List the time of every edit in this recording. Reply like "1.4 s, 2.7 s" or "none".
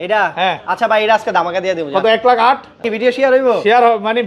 2.9 s